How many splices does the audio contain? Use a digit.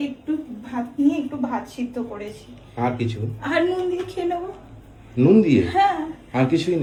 0